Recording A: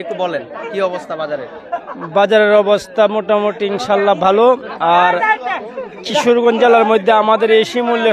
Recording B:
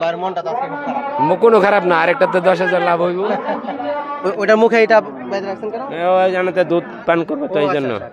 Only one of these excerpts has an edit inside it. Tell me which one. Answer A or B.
B